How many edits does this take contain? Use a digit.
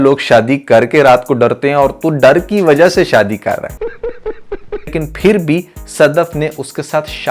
1